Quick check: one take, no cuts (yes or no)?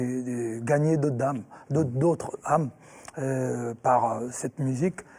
yes